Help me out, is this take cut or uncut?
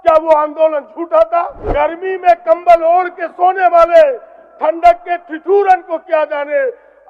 cut